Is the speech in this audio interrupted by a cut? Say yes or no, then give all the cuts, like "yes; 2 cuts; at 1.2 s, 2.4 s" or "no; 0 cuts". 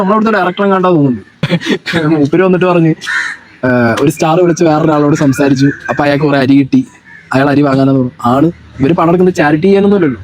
yes; 1 cut; at 1.5 s